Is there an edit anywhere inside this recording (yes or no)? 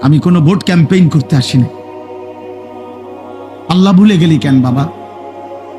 yes